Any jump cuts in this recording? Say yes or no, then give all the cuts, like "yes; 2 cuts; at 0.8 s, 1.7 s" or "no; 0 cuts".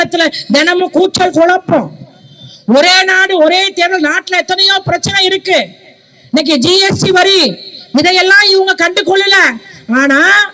no; 0 cuts